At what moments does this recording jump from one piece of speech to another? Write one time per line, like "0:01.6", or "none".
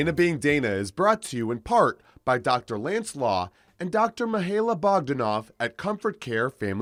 none